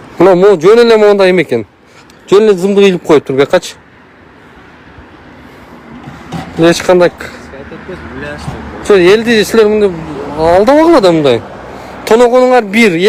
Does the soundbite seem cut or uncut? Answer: uncut